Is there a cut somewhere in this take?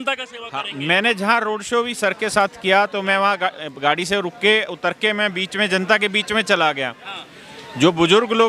no; 0 cuts

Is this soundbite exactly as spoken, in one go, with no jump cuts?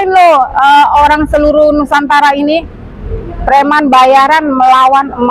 yes; 0 cuts

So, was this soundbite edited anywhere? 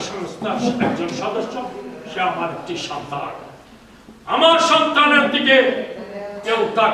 no; 0 cuts

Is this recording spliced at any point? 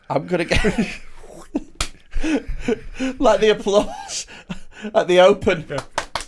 no; 0 cuts

